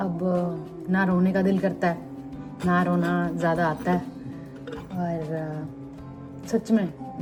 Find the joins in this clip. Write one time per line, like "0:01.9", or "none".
none